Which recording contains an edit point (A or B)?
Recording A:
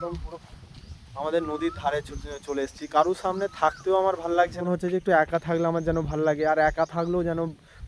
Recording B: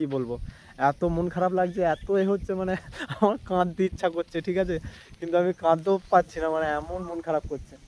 A